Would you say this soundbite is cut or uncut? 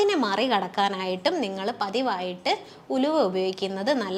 uncut